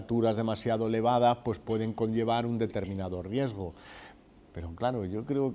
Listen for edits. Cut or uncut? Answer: uncut